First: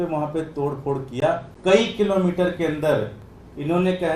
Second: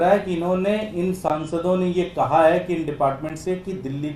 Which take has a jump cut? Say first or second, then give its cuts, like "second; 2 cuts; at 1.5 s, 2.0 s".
first; 1 cut; at 1.5 s